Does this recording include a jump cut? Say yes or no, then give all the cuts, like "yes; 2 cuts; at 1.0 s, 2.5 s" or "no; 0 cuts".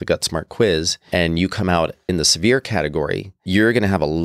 yes; 3 cuts; at 1.0 s, 2.0 s, 3.3 s